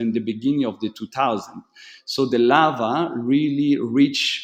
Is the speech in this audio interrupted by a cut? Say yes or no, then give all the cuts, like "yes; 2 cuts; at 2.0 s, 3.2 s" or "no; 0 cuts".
no; 0 cuts